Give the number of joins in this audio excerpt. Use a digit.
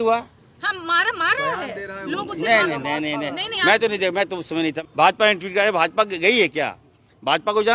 1